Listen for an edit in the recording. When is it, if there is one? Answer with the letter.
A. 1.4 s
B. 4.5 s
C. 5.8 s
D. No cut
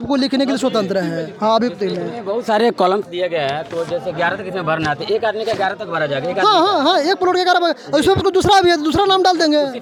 D